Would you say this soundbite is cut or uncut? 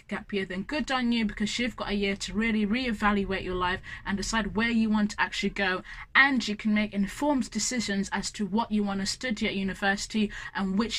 uncut